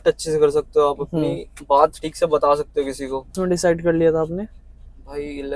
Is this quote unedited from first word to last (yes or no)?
no